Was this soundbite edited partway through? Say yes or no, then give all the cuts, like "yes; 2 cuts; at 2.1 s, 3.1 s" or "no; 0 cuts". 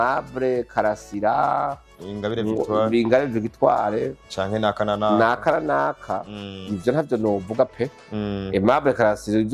no; 0 cuts